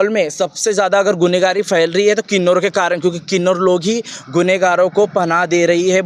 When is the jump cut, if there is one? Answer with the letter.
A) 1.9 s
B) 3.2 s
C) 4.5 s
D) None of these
D